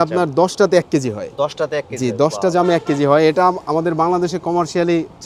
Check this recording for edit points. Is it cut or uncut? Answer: uncut